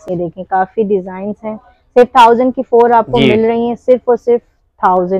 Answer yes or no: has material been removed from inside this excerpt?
no